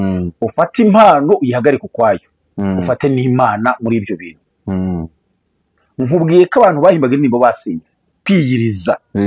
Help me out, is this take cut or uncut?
cut